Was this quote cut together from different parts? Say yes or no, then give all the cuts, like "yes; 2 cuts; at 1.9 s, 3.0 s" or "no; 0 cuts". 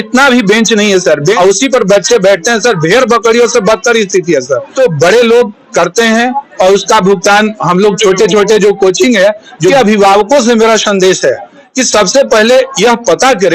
yes; 3 cuts; at 1.3 s, 4.7 s, 9.7 s